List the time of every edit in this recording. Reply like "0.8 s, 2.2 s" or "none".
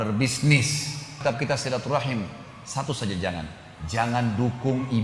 1.2 s